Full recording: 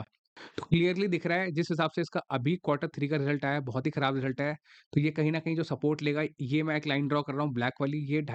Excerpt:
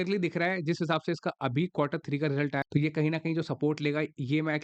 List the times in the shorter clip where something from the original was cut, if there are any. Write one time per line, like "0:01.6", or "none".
0:02.6